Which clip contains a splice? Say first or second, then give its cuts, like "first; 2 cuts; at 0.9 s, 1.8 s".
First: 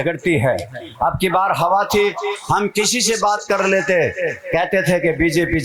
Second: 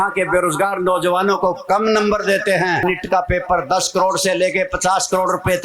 second; 1 cut; at 2.8 s